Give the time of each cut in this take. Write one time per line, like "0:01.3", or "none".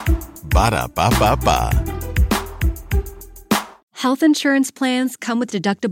0:03.8